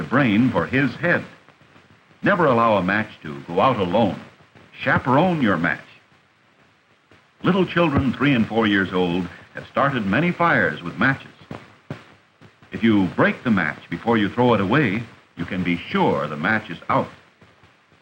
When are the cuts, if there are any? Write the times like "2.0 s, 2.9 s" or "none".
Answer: none